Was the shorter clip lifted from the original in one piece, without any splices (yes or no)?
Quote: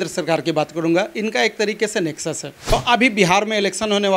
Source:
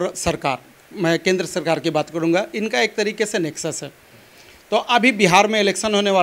no